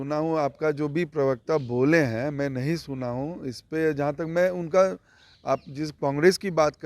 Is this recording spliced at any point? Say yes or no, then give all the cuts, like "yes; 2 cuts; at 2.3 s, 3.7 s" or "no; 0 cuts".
no; 0 cuts